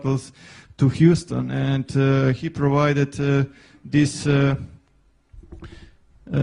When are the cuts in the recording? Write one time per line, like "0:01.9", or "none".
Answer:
0:04.8

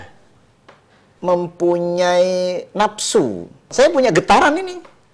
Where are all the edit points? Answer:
0:01.0
0:03.7

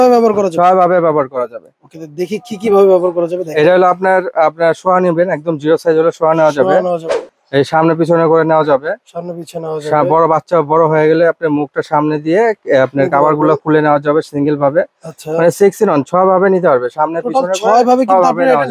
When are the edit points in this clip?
none

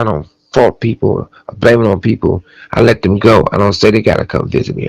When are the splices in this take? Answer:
none

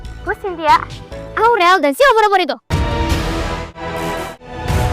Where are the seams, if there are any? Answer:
0:03.7

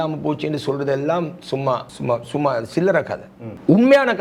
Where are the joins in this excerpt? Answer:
none

